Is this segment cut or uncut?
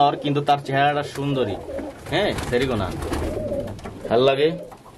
uncut